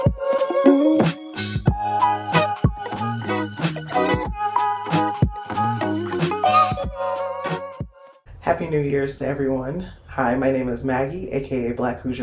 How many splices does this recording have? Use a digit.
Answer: 1